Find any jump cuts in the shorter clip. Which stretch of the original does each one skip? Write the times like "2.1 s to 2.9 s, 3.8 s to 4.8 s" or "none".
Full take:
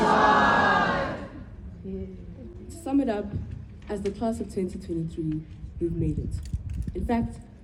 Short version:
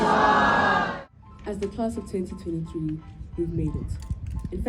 1.0 s to 3.4 s